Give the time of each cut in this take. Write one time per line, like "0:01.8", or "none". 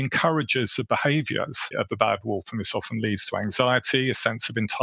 0:01.7